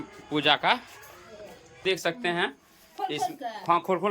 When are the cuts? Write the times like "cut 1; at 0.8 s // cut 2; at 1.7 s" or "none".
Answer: cut 1; at 1.8 s